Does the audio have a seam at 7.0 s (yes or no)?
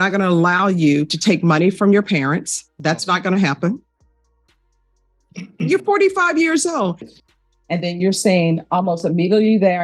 yes